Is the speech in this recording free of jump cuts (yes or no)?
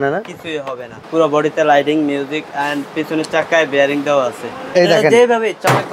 no